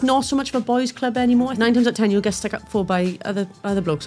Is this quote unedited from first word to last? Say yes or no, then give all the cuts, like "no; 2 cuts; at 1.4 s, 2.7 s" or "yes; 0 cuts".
no; 1 cut; at 1.5 s